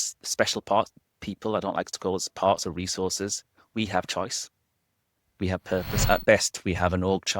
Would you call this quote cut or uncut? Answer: cut